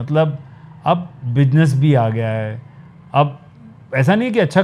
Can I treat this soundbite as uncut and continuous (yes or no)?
yes